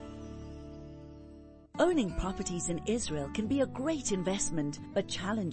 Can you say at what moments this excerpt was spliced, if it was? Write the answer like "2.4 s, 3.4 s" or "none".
1.6 s